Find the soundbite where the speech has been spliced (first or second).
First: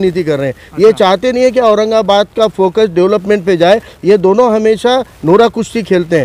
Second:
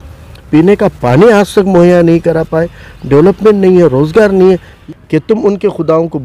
second